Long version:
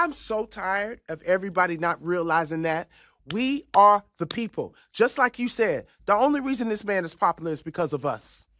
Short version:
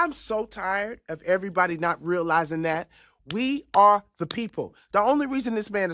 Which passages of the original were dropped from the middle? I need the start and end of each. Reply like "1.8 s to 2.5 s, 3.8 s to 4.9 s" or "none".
4.8 s to 5.9 s